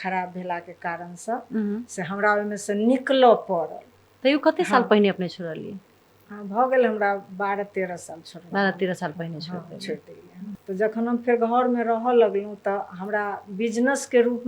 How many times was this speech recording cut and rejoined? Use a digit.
1